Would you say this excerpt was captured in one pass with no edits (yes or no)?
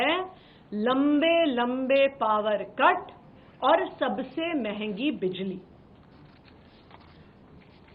yes